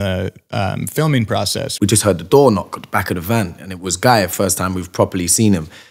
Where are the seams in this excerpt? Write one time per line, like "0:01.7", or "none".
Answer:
0:01.6